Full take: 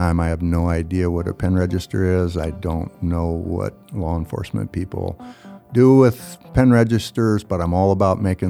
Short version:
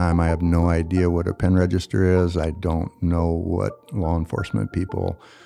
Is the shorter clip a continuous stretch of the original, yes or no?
yes